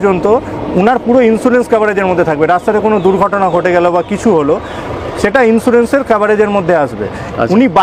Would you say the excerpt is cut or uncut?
uncut